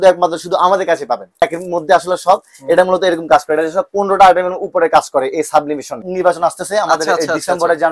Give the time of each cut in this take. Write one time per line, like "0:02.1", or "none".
0:01.4
0:06.0